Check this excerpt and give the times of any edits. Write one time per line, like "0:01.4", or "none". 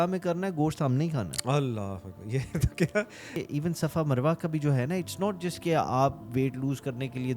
0:03.4